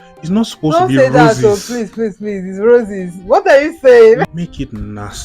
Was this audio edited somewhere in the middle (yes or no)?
yes